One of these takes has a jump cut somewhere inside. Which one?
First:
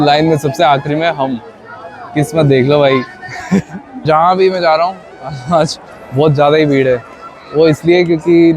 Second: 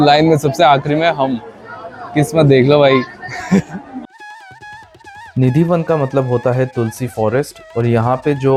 first; 1 cut; at 4.0 s

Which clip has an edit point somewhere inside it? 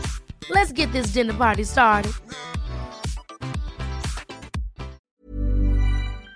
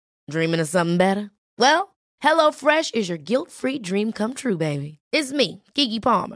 first; 1 cut; at 5.0 s

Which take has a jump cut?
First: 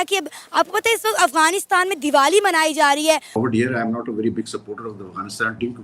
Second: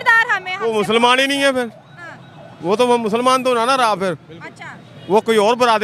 first; 1 cut; at 3.3 s

